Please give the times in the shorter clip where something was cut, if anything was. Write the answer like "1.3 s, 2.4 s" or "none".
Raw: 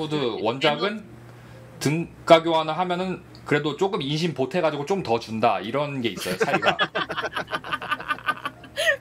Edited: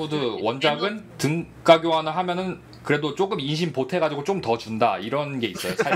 1.1 s